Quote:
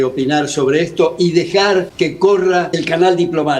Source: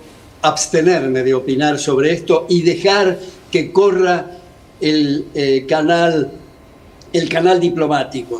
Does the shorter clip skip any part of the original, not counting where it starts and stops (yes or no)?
yes